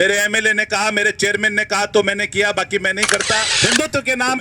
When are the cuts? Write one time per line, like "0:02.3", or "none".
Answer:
0:03.5